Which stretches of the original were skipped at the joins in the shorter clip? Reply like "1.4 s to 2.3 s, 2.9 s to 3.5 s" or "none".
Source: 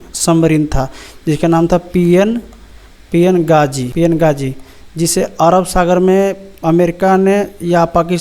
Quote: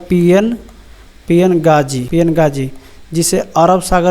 none